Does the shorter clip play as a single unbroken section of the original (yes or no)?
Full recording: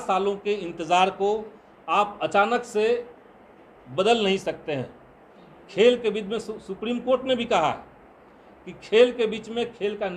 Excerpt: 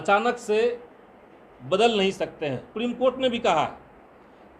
no